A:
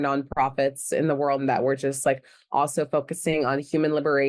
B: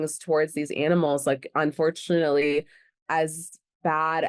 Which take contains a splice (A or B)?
A